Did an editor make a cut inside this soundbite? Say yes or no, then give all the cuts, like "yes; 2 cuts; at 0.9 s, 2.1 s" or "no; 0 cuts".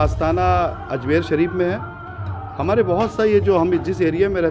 no; 0 cuts